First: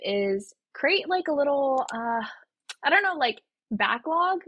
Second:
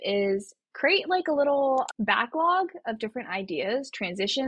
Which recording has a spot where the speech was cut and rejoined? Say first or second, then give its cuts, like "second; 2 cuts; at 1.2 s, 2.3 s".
second; 1 cut; at 1.9 s